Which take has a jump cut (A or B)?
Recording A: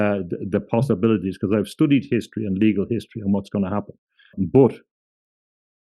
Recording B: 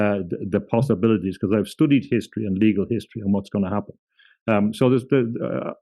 A